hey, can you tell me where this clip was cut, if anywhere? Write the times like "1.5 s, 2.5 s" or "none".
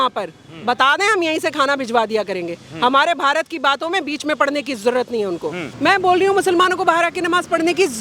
5.7 s